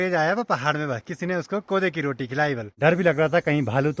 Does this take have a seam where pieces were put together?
yes; 1 cut; at 2.7 s

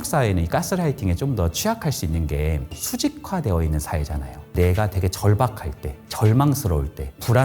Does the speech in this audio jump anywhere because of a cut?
yes; 2 cuts; at 2.7 s, 4.5 s

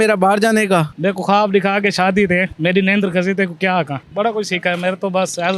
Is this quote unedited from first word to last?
no; 2 cuts; at 0.9 s, 3.9 s

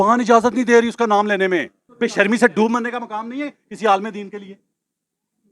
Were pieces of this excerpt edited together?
yes; 1 cut; at 1.8 s

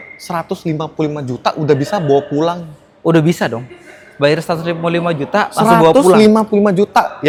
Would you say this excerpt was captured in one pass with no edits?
yes; 0 cuts

